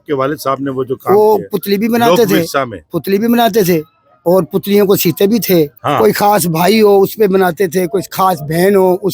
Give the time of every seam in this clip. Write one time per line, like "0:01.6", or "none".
0:05.8